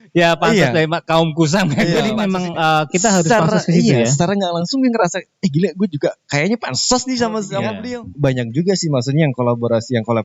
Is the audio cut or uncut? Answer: cut